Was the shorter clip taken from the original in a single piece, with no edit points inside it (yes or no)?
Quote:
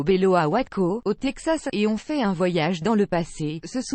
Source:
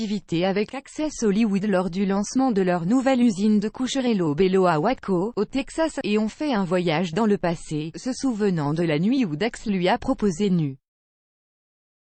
yes